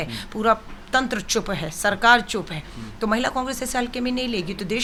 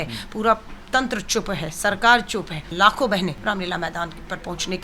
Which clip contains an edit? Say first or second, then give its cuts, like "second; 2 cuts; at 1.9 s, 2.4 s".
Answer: second; 2 cuts; at 2.7 s, 3.4 s